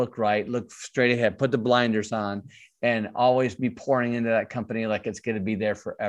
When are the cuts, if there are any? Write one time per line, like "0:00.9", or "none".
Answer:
none